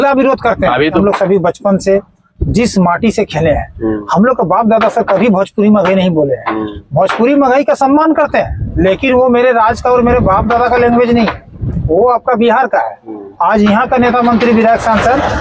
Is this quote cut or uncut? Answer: cut